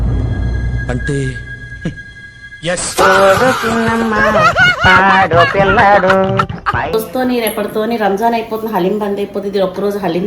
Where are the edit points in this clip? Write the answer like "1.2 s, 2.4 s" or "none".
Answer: 6.9 s